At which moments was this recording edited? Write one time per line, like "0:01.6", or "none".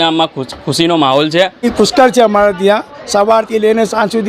0:01.7